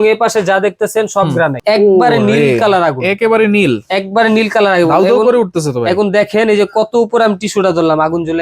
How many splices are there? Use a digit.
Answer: 1